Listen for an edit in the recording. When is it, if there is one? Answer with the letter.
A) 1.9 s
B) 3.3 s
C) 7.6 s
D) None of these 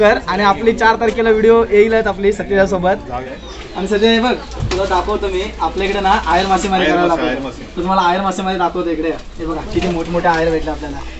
B